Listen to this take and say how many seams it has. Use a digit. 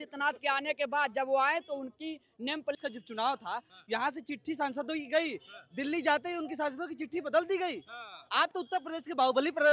1